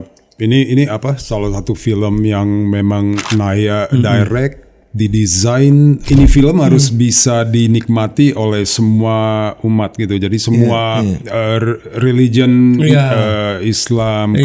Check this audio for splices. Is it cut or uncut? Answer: cut